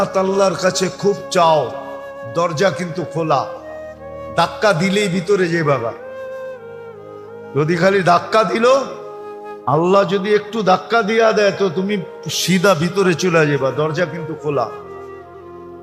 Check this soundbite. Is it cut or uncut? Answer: uncut